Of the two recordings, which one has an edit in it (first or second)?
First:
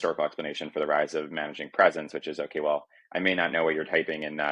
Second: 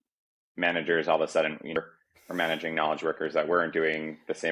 second